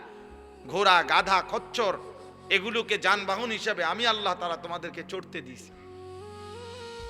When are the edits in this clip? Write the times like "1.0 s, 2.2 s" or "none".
5.9 s